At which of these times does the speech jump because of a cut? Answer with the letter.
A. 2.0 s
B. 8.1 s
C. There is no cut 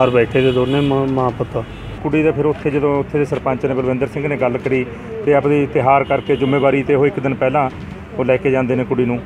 A